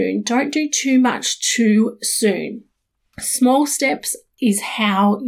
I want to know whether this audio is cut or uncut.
uncut